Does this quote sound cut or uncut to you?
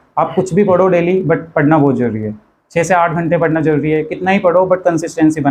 uncut